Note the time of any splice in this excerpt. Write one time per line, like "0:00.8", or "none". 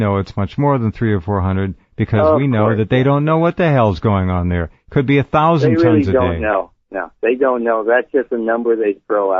0:02.6